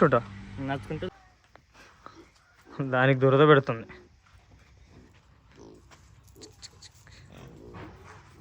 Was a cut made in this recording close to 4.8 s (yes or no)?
no